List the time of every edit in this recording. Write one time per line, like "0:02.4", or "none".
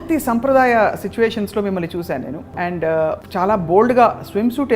0:02.4
0:03.2